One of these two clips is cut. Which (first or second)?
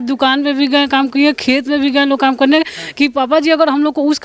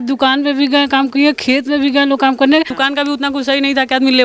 second